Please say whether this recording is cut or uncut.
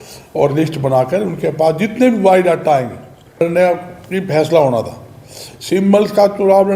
cut